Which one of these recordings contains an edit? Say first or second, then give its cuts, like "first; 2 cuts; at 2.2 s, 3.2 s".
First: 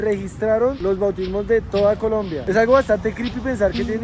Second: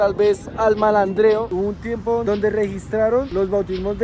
second; 1 cut; at 1.5 s